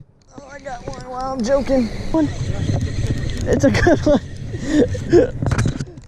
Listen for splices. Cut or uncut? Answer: cut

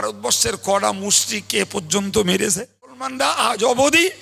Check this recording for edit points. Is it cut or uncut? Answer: cut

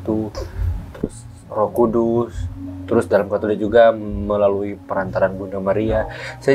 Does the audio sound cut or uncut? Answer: uncut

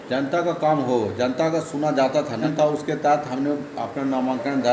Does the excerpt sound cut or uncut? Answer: cut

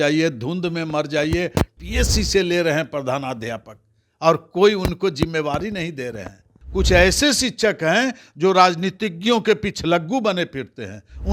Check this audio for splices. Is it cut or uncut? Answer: cut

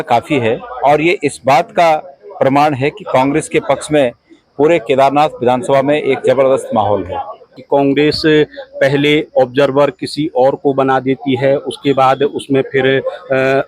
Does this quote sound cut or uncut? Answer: cut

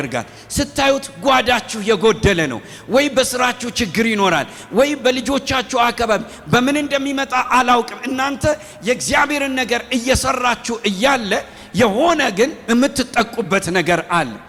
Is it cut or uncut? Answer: uncut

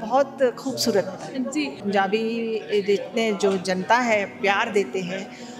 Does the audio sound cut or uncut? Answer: cut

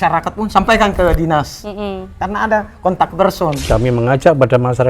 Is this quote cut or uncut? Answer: cut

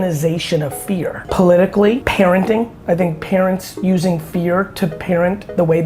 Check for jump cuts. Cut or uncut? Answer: cut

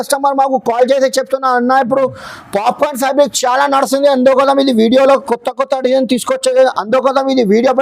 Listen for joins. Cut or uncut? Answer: uncut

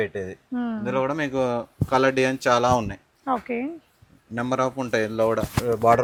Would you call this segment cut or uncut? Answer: uncut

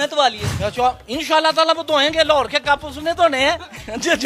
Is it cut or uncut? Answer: uncut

